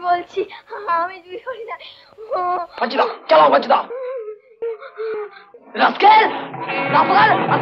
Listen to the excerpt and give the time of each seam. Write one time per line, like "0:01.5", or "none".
none